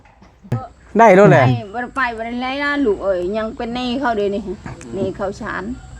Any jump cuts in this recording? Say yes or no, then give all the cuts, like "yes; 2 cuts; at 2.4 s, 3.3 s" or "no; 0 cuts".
yes; 1 cut; at 1.5 s